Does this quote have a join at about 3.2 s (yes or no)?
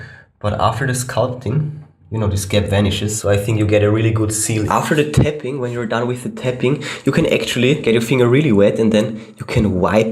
yes